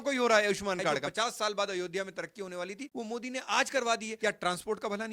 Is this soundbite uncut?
no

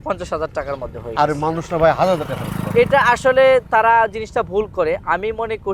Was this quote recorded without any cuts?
yes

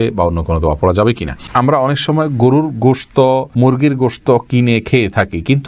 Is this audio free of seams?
no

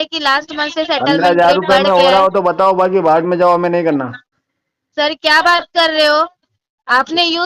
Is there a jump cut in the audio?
no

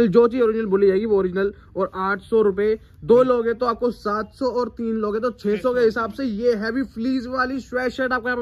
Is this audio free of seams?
yes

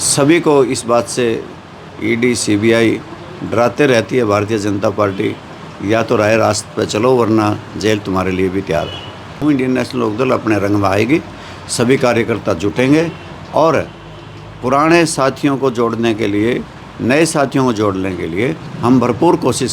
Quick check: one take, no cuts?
no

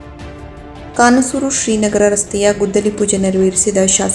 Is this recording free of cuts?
no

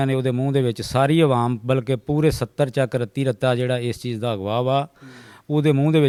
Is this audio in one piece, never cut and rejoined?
yes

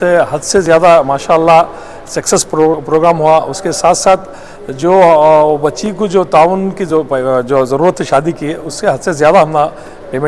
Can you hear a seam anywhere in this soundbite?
no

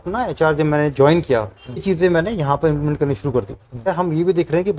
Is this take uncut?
no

